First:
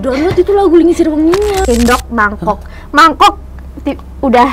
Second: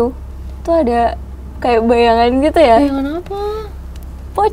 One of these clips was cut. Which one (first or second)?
first